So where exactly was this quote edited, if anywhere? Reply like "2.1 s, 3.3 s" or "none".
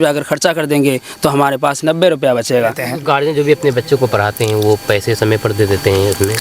2.9 s